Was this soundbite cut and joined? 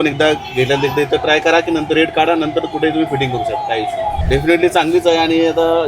yes; 1 cut; at 4.2 s

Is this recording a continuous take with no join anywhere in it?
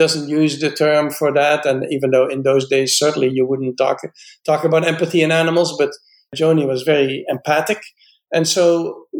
no; 1 cut; at 6.3 s

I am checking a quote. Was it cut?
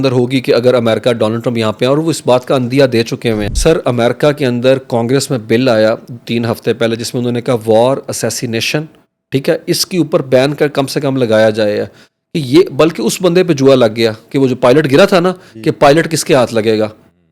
yes; 1 cut; at 3.5 s

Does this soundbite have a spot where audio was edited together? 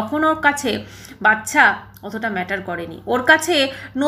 no; 0 cuts

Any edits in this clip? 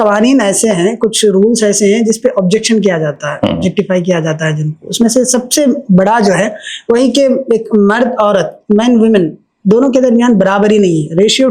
no; 0 cuts

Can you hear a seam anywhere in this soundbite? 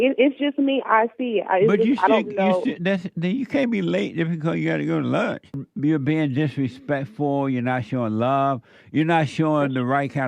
yes; 1 cut; at 5.7 s

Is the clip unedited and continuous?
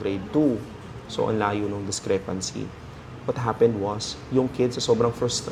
yes; 0 cuts

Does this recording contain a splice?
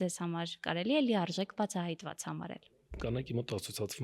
yes; 1 cut; at 2.9 s

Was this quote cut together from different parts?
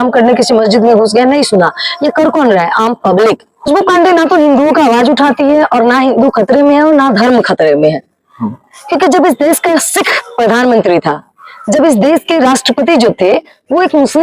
yes; 1 cut; at 3.5 s

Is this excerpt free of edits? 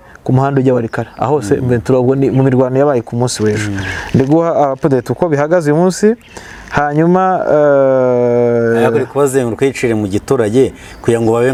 yes; 0 cuts

